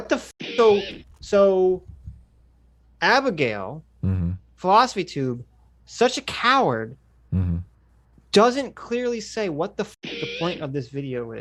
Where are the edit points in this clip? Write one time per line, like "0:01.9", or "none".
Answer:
none